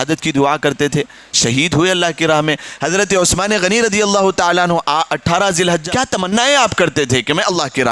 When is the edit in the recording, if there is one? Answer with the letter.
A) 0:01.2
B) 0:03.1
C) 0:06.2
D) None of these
C